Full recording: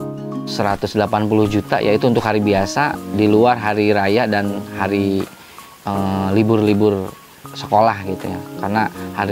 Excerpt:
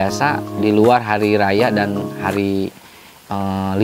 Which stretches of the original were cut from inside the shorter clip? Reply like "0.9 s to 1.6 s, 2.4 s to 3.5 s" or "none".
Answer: none

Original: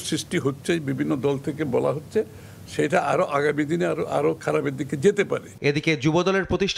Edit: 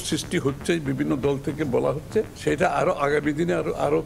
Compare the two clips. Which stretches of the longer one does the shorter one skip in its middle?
2.3 s to 2.7 s

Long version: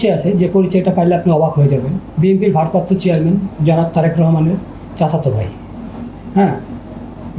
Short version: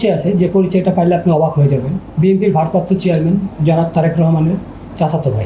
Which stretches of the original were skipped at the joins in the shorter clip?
none

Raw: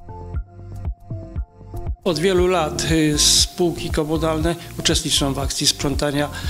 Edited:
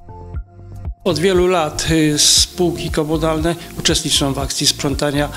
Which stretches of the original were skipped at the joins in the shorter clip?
1.0 s to 2.0 s

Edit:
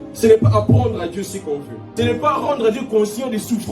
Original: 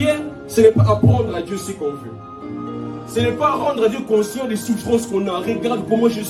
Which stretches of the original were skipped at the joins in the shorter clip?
2.1 s to 3.0 s

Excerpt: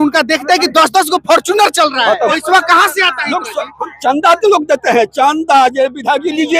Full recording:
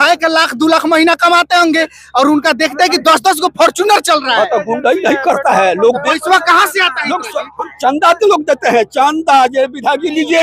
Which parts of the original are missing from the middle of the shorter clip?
4.6 s to 6.1 s

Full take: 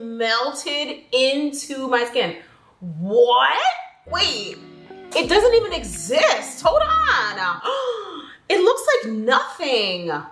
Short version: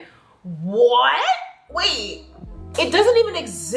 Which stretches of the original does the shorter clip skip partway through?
none

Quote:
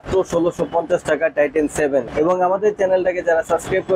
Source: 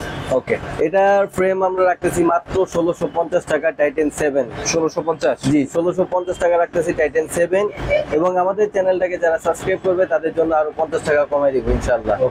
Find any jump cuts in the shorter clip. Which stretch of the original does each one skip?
4.5 s to 8.1 s

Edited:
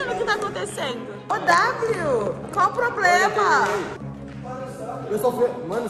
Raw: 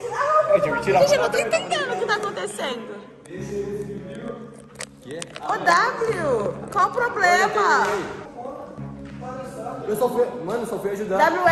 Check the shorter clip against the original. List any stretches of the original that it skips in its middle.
3.0 s to 5.4 s, 8.2 s to 8.8 s

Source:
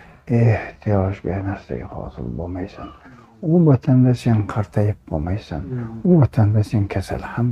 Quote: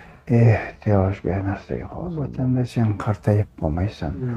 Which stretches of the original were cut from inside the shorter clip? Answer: 2.1 s to 3.6 s

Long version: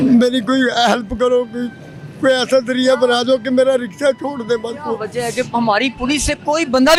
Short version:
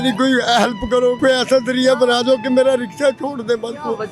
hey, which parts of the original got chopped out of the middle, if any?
1.5 s to 2.2 s

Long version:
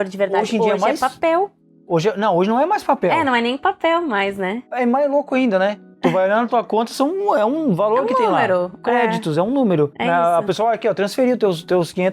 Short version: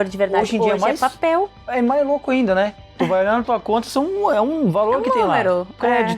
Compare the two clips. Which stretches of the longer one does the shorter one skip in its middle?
1.6 s to 4.6 s

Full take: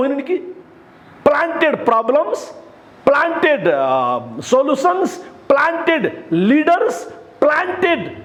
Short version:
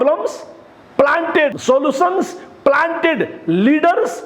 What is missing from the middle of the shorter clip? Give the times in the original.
3.6 s to 4.4 s

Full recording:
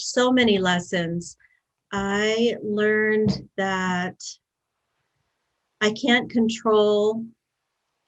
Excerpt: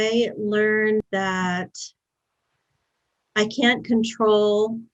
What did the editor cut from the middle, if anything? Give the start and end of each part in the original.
3.3 s to 3.5 s

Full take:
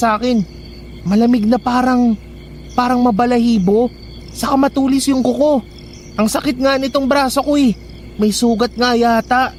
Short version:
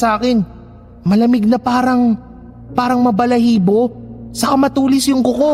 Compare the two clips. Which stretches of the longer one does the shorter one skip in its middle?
none

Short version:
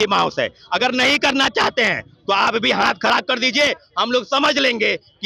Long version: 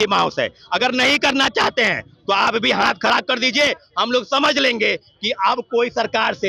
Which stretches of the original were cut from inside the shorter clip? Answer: none

